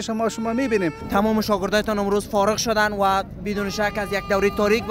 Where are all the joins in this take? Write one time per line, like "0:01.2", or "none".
0:01.0

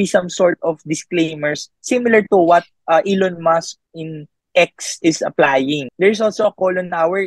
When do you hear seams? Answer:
0:05.9

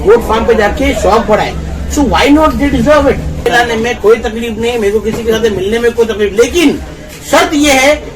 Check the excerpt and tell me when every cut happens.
0:03.4

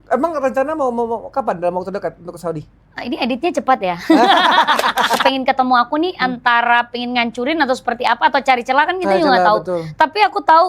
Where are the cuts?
0:05.2

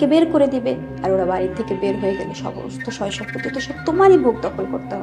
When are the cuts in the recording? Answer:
none

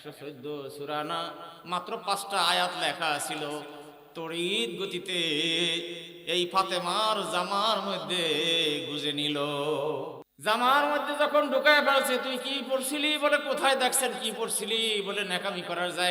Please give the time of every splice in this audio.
0:10.2

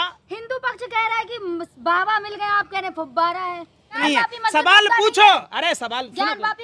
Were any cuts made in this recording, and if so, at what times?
0:04.0

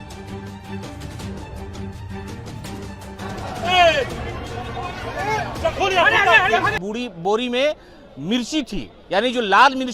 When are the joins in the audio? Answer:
0:06.8

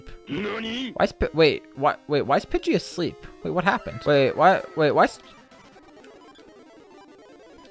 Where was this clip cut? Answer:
0:03.9

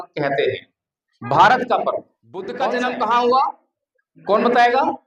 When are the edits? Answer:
0:02.5

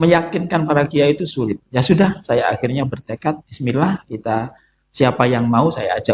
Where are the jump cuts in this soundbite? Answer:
none

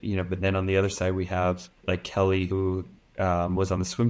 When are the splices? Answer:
0:01.7

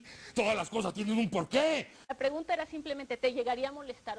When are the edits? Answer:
none

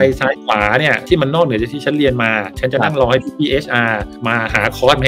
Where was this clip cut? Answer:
0:01.0
0:02.8

